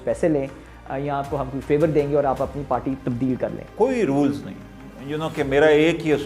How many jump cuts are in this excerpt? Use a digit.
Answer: 1